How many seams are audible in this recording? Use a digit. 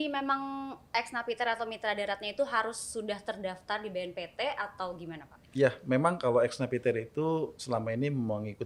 0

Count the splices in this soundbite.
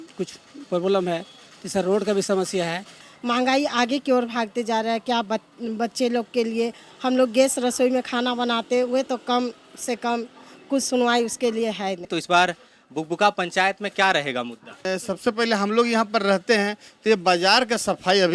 3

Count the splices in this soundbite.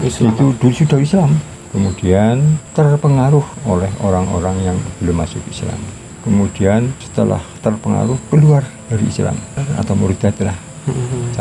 6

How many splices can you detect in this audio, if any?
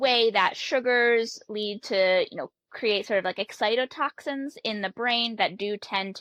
0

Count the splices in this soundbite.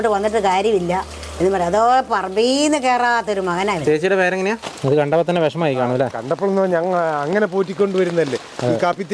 1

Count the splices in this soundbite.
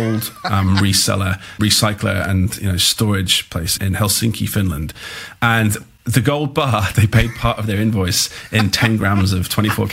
2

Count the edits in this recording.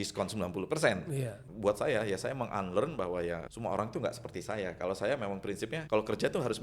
3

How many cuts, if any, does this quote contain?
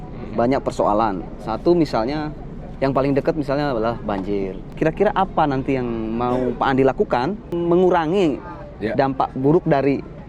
2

